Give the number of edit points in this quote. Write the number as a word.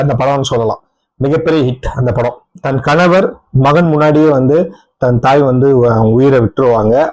one